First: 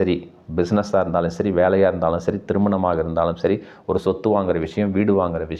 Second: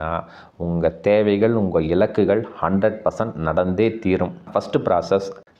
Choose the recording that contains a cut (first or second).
second